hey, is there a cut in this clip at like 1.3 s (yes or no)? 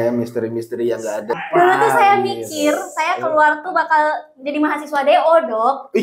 yes